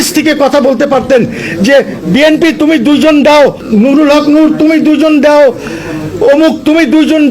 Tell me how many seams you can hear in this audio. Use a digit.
1